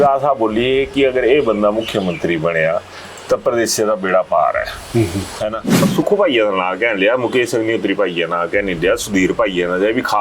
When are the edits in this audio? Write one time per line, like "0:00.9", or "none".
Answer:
0:05.9